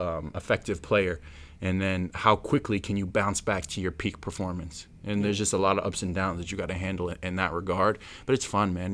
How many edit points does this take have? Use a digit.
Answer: 0